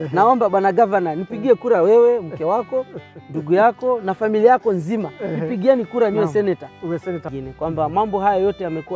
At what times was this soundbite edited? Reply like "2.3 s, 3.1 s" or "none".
7.3 s